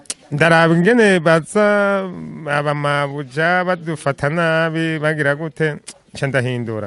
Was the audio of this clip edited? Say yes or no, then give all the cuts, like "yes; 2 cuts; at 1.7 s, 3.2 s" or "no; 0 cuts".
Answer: no; 0 cuts